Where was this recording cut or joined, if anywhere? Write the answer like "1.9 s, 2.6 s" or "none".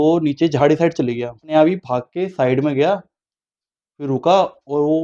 1.5 s